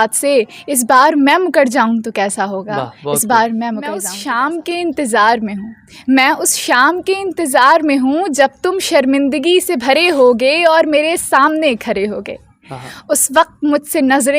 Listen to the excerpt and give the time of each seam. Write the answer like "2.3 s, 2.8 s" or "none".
4.1 s

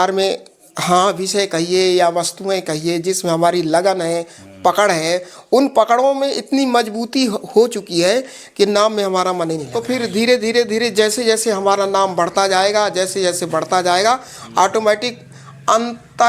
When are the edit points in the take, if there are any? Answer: 9.7 s

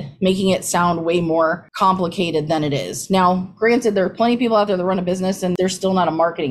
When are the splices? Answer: 5.5 s

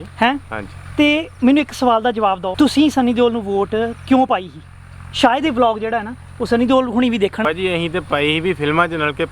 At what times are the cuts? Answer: 2.5 s, 7.4 s

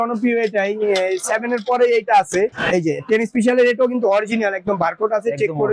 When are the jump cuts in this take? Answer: 2.5 s

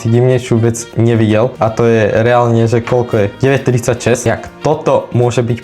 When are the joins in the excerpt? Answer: 1.5 s, 3.3 s, 4.3 s

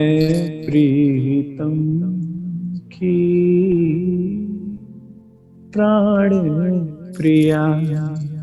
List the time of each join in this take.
none

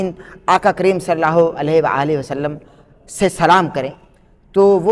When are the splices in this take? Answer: none

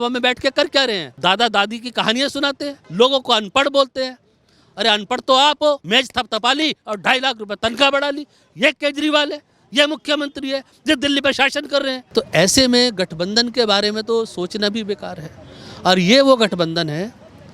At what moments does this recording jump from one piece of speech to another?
1.1 s, 2.8 s, 5.8 s, 12.0 s

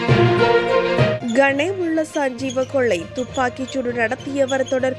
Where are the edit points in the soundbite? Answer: 1.2 s

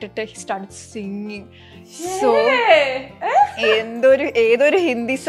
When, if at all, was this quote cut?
none

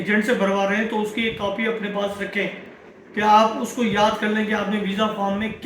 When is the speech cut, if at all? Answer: none

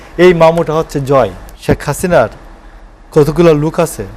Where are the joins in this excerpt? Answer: 1.5 s

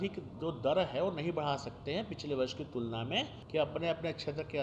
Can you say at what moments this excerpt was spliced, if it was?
3.4 s

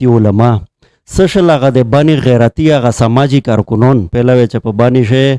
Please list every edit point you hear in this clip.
4.1 s

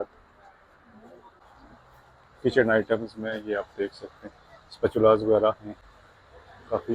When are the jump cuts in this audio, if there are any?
1.4 s

